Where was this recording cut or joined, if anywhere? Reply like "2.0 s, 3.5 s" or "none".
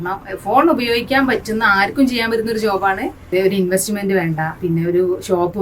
3.2 s, 4.5 s